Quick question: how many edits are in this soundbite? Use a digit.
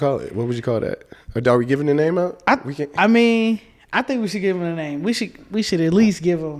0